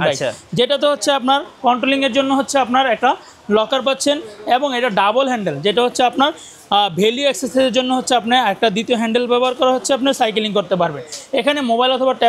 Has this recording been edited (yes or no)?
no